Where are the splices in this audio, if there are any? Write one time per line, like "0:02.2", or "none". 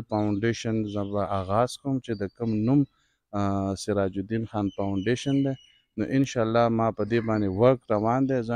none